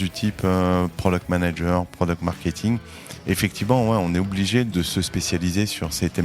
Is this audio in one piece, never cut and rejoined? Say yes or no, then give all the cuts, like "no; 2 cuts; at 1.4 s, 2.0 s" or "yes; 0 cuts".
no; 1 cut; at 4.7 s